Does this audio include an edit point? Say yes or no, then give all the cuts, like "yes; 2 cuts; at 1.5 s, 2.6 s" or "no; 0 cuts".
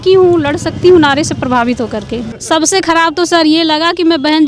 yes; 1 cut; at 2.3 s